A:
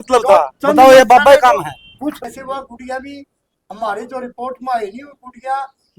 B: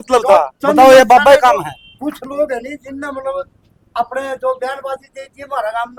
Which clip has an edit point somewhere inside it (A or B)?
A